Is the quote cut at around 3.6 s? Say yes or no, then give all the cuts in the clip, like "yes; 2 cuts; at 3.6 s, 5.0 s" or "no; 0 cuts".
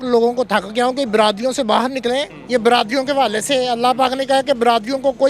no; 1 cut; at 2.3 s